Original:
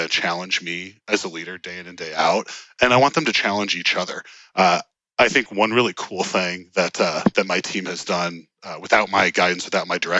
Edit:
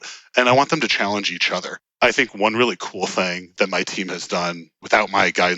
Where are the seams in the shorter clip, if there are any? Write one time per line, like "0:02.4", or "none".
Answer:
0:01.8
0:03.6
0:04.7